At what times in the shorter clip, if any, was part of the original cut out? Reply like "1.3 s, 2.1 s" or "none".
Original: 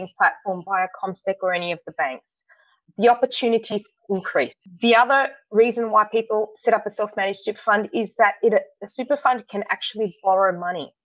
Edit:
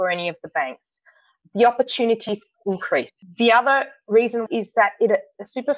4.4 s